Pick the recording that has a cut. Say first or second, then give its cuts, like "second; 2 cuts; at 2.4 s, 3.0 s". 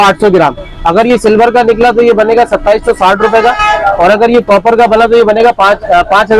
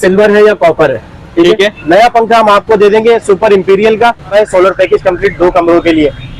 second; 2 cuts; at 1.8 s, 4.3 s